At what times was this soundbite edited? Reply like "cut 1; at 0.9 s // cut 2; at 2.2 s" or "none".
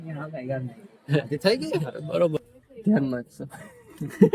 cut 1; at 2.4 s